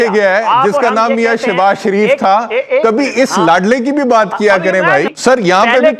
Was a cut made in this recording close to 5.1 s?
yes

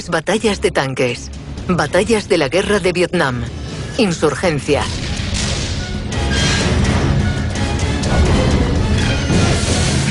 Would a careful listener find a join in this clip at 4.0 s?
yes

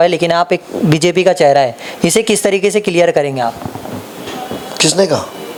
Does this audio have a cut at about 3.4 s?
no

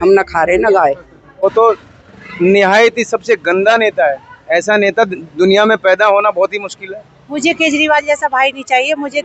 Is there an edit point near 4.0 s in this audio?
no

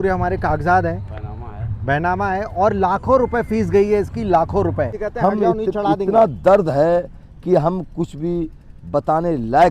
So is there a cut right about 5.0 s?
yes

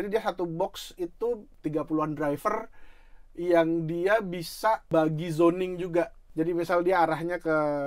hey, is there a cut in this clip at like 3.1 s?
no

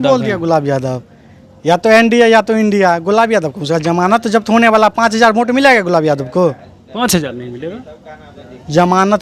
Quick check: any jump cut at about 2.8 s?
no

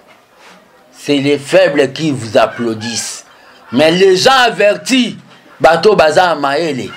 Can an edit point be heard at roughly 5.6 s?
no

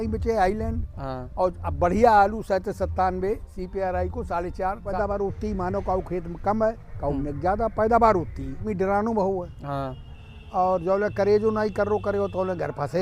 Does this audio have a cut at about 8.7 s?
yes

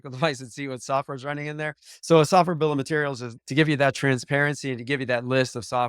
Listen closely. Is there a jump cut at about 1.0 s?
no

